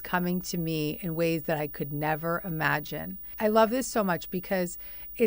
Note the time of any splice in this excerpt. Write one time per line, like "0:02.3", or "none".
0:03.2